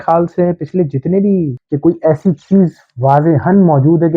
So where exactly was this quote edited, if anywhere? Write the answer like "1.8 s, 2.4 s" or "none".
1.6 s